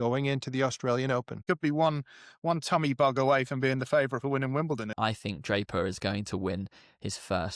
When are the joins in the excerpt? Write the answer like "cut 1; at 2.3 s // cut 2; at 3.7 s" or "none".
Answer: cut 1; at 1.4 s // cut 2; at 4.9 s